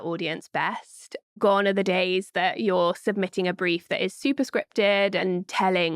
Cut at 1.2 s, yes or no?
yes